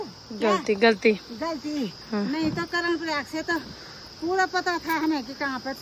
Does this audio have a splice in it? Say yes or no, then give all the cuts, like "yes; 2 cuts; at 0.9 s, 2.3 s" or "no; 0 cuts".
no; 0 cuts